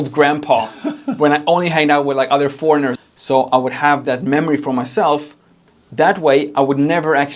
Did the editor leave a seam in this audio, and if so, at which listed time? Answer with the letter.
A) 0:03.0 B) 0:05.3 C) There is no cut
A